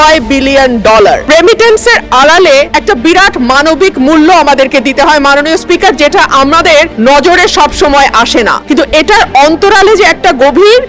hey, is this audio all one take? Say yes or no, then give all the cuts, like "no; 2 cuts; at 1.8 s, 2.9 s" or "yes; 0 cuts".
no; 4 cuts; at 1.3 s, 2.7 s, 6.9 s, 8.6 s